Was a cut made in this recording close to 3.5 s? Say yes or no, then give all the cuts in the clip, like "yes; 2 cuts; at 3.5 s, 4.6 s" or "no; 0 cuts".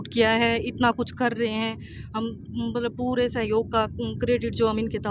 no; 0 cuts